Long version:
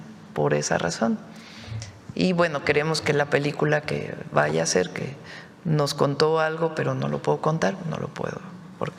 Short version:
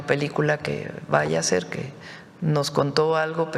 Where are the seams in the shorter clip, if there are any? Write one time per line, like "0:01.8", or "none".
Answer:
none